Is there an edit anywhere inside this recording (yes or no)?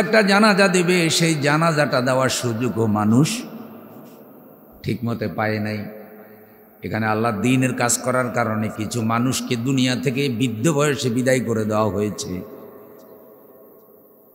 no